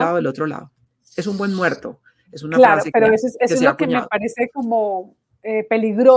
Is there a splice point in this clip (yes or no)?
no